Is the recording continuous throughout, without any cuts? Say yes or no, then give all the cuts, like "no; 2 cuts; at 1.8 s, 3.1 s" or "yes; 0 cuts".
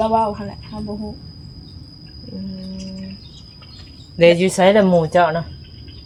yes; 0 cuts